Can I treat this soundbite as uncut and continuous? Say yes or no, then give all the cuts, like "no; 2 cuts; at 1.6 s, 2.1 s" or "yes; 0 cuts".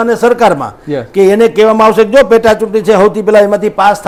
yes; 0 cuts